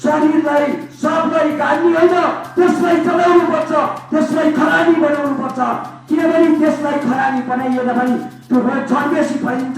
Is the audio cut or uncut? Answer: uncut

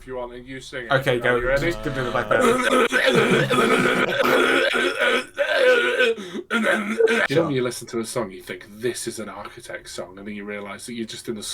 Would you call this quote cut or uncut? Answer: cut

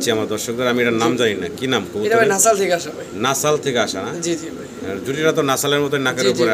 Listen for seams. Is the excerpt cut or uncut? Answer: uncut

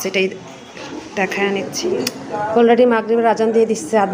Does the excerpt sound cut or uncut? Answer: cut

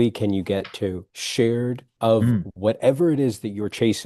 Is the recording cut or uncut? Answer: cut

